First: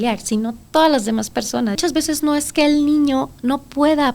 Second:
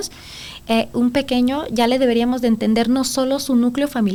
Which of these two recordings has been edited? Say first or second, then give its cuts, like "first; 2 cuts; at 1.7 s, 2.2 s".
first; 1 cut; at 1.8 s